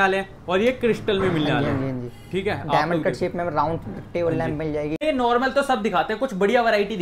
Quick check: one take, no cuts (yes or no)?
yes